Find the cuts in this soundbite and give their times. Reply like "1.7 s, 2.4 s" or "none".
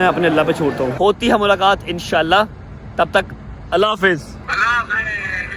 0.9 s, 4.4 s